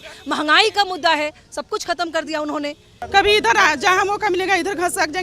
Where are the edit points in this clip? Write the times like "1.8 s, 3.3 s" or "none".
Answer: 2.9 s